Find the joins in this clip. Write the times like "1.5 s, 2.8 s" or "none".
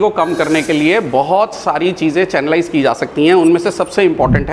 none